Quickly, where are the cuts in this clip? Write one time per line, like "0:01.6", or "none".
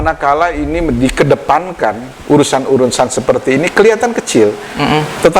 none